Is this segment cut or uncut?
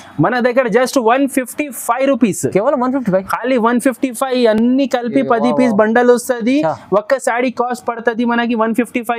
uncut